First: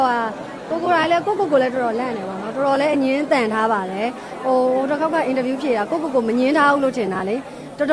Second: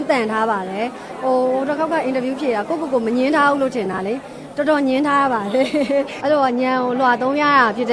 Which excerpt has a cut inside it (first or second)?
second